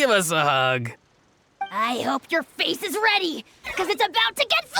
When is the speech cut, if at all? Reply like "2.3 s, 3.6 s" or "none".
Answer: 1.7 s